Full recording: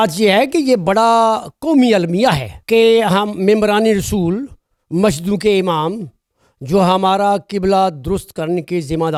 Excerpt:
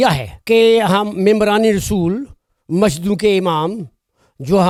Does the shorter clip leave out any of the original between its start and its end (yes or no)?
no